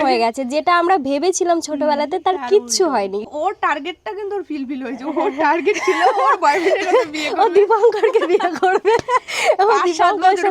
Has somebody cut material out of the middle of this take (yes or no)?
yes